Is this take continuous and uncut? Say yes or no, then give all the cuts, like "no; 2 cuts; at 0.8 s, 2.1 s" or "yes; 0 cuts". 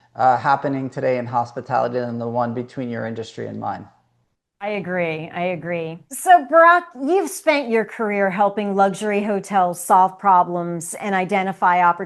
yes; 0 cuts